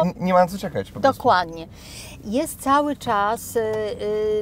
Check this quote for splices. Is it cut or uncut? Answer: uncut